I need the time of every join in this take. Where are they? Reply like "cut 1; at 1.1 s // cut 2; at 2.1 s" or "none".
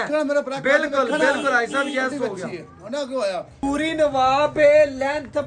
cut 1; at 3.5 s